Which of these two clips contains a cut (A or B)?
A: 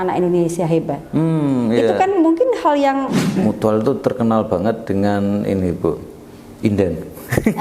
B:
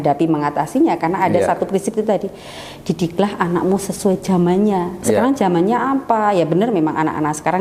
A